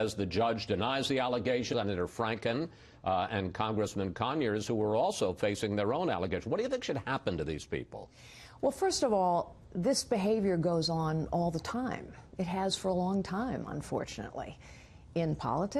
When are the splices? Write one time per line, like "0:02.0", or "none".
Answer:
none